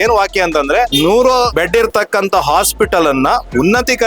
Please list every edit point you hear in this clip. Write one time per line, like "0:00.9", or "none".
0:00.9
0:01.5